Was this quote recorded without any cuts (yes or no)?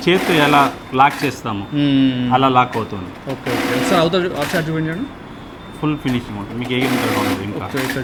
yes